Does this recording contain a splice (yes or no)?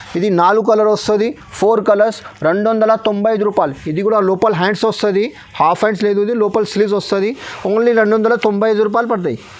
no